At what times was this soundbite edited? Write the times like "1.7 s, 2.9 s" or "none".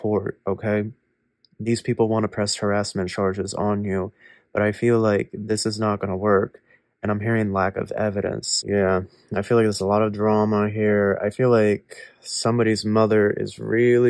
8.5 s